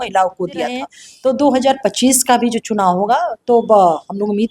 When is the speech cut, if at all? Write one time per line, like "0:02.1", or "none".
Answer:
0:01.0